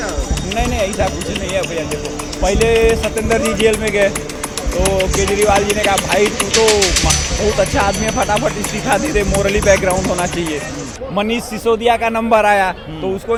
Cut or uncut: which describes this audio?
uncut